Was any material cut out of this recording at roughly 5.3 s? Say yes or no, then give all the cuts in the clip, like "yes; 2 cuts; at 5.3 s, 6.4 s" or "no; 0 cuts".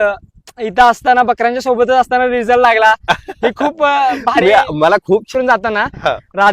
yes; 1 cut; at 5.3 s